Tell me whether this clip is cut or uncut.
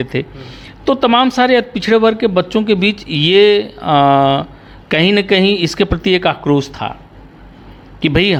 uncut